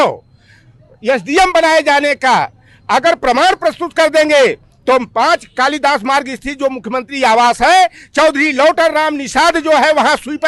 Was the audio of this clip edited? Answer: no; 0 cuts

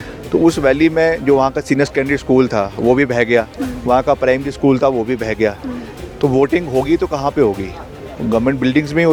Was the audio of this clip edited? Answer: no; 0 cuts

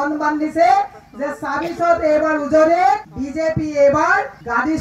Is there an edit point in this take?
no; 0 cuts

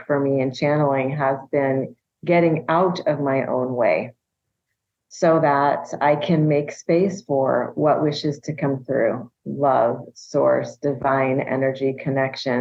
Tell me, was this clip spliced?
no; 0 cuts

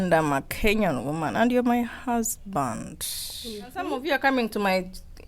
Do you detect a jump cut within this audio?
yes; 1 cut; at 3.9 s

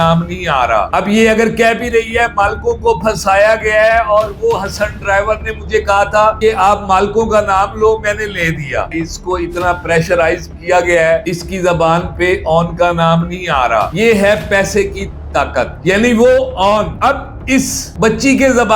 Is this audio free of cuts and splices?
no; 3 cuts; at 8.9 s, 11.2 s, 13.9 s

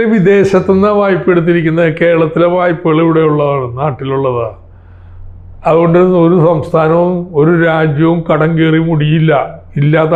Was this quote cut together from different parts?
no; 0 cuts

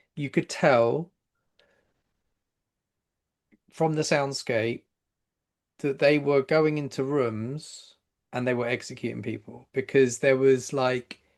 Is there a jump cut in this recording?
no; 0 cuts

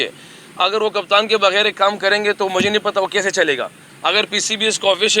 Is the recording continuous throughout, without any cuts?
no; 1 cut; at 3.8 s

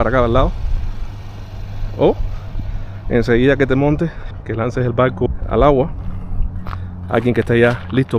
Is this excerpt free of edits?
no; 2 cuts; at 4.3 s, 5.3 s

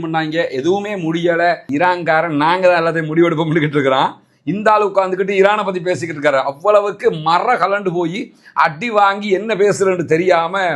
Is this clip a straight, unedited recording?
no; 1 cut; at 1.6 s

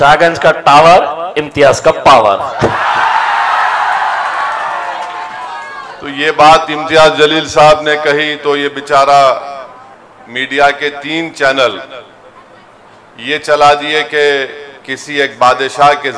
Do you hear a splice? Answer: no; 0 cuts

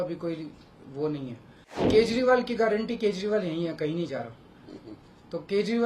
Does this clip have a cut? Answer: yes; 1 cut; at 1.9 s

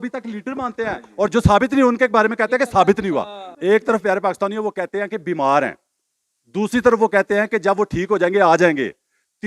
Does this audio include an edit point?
yes; 1 cut; at 3.5 s

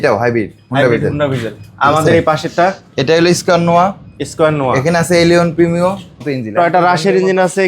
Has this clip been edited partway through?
yes; 1 cut; at 6.3 s

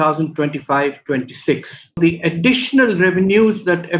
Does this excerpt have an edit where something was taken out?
yes; 1 cut; at 2.0 s

